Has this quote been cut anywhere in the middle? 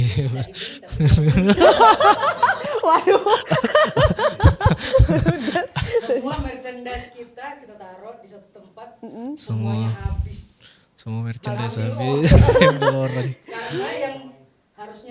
no; 0 cuts

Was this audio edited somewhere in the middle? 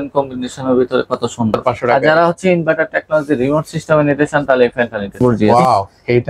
yes; 2 cuts; at 1.8 s, 5.4 s

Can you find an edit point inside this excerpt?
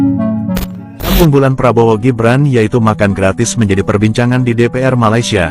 yes; 1 cut; at 1.1 s

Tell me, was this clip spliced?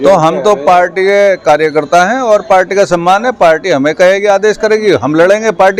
no; 0 cuts

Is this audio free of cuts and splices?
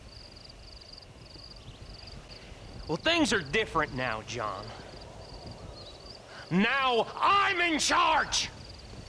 no; 1 cut; at 2.3 s

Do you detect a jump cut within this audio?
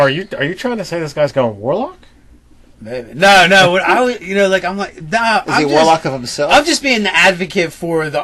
no; 0 cuts

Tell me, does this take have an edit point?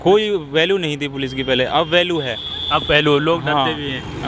no; 0 cuts

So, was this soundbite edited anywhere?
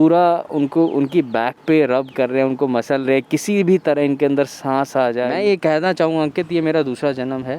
yes; 1 cut; at 5.3 s

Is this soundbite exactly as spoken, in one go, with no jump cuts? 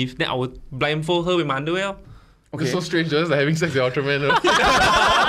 yes; 0 cuts

